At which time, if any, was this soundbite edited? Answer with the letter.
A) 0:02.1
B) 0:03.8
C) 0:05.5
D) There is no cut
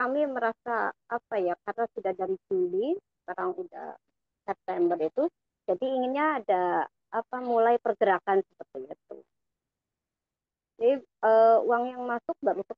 D